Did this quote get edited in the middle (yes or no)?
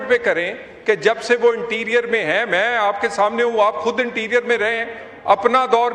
no